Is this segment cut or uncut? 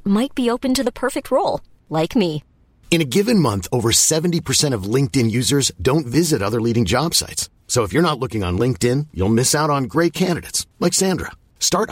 uncut